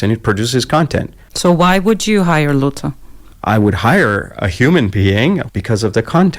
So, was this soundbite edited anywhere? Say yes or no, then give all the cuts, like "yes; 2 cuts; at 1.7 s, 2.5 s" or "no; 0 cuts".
yes; 2 cuts; at 1.2 s, 5.4 s